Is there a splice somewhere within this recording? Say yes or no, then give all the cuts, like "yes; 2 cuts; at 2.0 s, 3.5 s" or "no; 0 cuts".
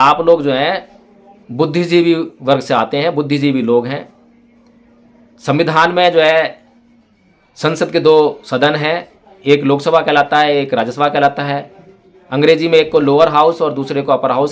no; 0 cuts